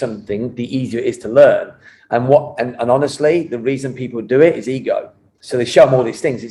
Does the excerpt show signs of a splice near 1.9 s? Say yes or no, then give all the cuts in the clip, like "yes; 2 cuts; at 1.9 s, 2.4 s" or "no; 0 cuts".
no; 0 cuts